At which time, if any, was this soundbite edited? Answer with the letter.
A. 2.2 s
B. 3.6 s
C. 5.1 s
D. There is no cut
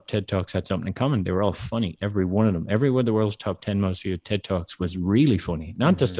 D